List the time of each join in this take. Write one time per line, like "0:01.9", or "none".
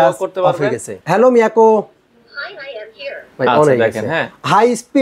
0:00.9

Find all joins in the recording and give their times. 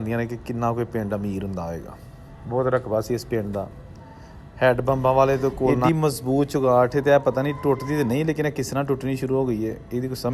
0:05.8

